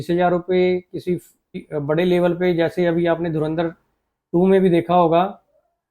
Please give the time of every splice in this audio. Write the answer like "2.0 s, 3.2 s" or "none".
1.7 s

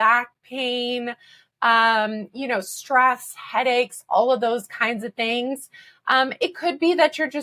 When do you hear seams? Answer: none

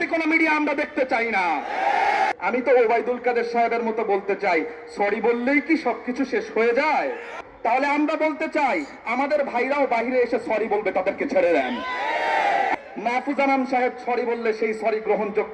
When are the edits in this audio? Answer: 2.3 s, 7.4 s, 12.7 s

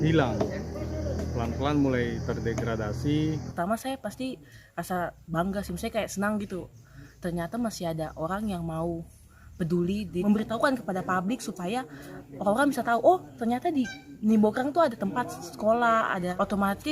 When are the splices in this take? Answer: 3.5 s, 10.2 s

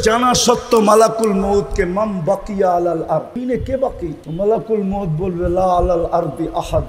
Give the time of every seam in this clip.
3.4 s, 4.2 s

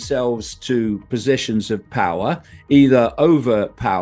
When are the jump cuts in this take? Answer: none

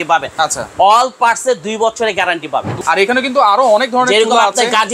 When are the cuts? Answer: 2.7 s

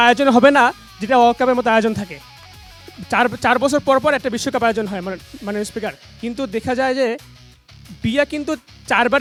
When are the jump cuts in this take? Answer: none

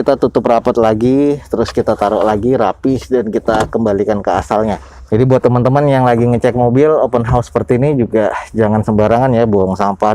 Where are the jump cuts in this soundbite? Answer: none

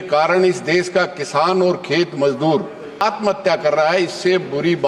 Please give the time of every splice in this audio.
3.0 s

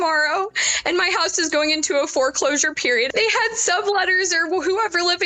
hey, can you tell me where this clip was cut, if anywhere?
3.1 s

